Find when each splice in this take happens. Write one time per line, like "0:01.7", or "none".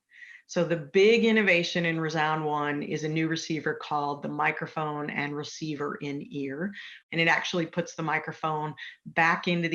0:06.9

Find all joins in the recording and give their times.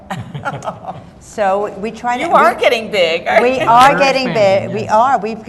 0:02.2

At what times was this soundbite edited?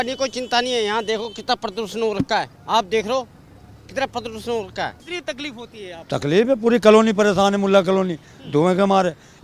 0:02.6
0:05.1

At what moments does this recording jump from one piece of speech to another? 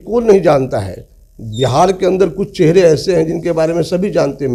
none

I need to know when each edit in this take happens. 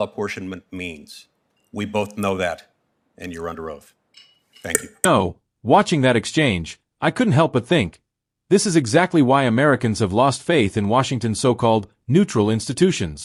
none

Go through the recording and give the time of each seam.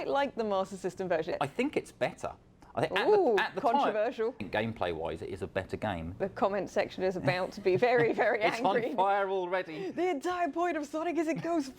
0:01.4
0:04.5
0:06.2

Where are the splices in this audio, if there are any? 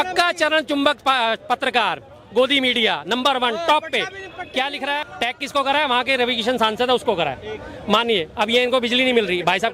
0:05.0

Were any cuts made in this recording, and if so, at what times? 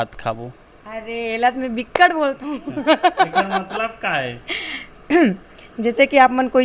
none

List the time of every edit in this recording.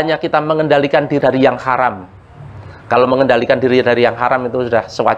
0:01.2

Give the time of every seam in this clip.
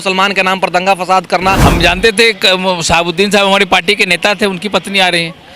0:01.6

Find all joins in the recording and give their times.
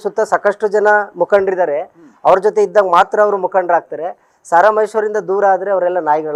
none

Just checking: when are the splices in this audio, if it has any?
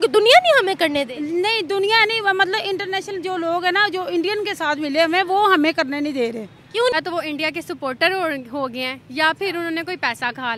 0:06.9

